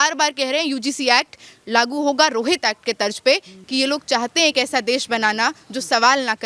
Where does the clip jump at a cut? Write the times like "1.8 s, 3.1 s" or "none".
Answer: 3.5 s